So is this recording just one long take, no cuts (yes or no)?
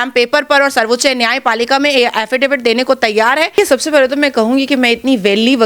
no